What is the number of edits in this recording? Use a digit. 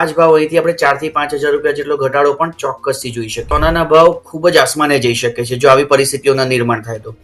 1